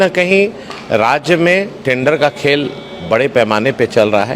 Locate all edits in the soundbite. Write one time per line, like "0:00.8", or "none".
none